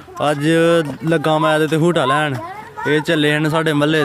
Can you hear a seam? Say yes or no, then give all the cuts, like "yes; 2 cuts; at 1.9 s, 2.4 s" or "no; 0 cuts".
no; 0 cuts